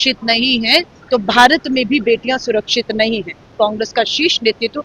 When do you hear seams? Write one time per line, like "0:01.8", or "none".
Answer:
0:03.5